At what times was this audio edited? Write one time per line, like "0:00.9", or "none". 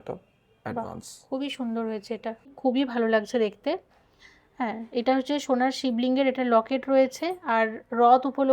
0:02.5